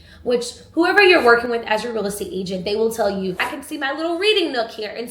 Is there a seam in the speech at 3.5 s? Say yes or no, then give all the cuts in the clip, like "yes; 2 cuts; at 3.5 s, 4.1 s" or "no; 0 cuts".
yes; 1 cut; at 3.5 s